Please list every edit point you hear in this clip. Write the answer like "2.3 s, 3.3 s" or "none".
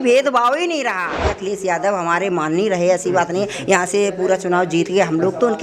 1.3 s